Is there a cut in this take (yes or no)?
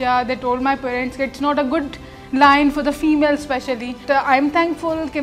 yes